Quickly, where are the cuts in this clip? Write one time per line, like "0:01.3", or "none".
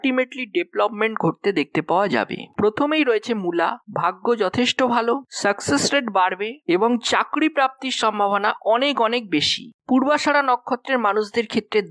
0:02.4
0:09.6